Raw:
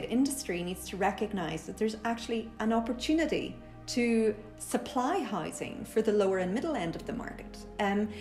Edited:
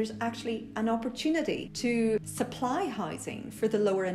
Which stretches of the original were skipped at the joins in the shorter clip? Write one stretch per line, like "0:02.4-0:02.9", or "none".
0:03.9-0:04.4

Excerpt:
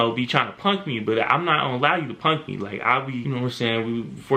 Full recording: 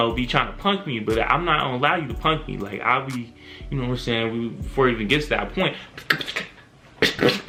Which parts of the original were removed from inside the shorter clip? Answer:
0:03.2-0:03.7

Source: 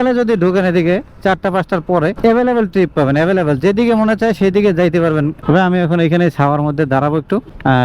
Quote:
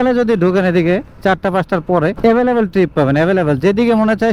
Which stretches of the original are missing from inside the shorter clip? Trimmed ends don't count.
none

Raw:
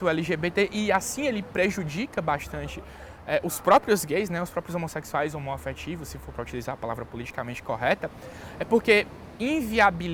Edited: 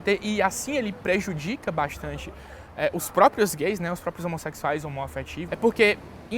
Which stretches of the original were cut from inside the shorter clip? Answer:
0:05.9-0:08.5

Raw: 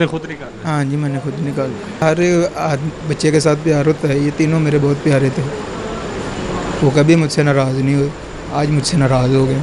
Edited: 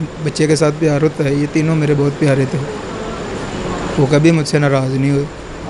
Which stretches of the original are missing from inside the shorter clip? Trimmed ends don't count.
none

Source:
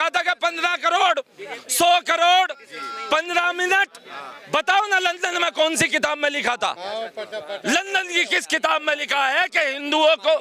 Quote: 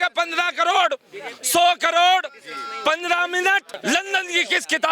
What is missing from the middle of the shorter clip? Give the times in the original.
0:04.0-0:07.5

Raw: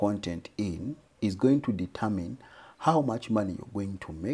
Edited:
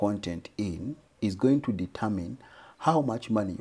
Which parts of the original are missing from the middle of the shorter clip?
none

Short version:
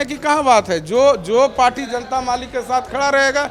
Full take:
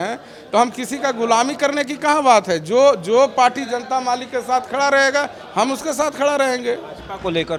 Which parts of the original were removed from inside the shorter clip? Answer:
none

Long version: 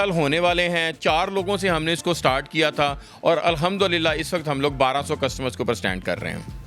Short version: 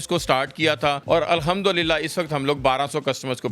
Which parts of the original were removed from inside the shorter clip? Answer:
0:03.0-0:03.2

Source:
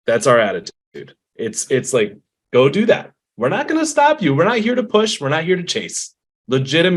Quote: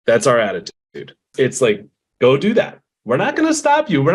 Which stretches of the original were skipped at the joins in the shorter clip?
0:01.3-0:01.6

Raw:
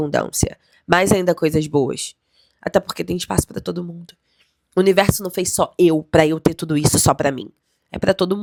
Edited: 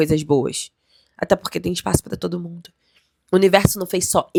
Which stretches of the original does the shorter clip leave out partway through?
none

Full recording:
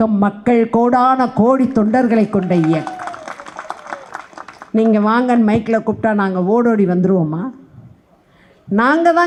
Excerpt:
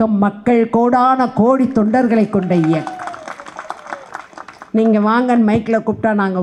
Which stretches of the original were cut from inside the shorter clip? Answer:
none

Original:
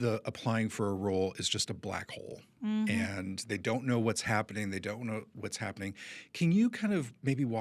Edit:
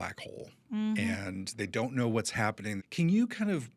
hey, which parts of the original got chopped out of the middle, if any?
0:04.7-0:06.3

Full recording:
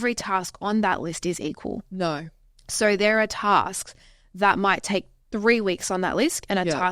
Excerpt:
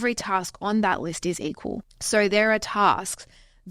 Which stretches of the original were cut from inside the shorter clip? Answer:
0:01.8-0:02.5

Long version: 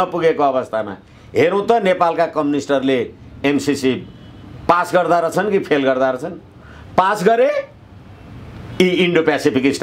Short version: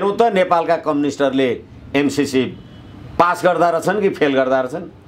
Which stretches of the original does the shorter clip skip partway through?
none

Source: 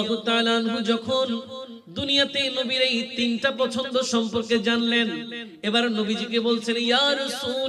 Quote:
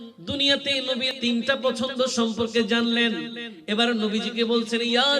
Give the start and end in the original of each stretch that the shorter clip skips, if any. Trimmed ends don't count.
0:02.8-0:03.0

